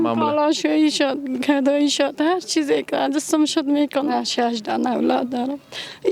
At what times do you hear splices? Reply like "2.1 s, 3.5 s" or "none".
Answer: 4.1 s